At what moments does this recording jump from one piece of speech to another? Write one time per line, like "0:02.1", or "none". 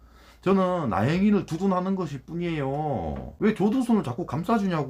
0:03.2